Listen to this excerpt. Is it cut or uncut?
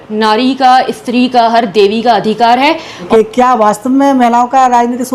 cut